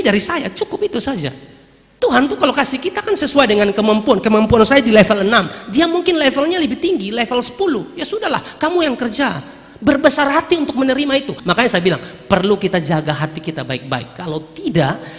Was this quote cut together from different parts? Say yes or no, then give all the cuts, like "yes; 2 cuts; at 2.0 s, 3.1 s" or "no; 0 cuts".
yes; 1 cut; at 11.3 s